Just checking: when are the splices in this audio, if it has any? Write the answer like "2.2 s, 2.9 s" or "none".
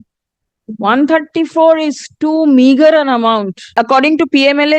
3.7 s